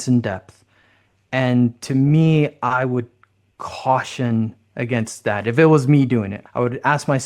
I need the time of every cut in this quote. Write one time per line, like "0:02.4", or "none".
0:06.4